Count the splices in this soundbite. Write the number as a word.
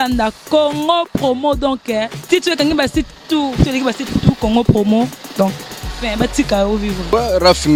zero